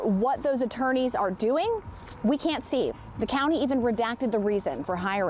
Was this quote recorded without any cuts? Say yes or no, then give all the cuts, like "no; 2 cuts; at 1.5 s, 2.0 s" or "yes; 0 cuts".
yes; 0 cuts